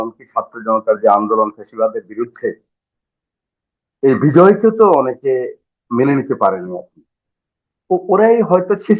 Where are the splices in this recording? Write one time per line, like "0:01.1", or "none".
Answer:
none